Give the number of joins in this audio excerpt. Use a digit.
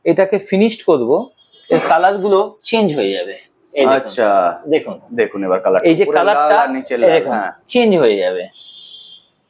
0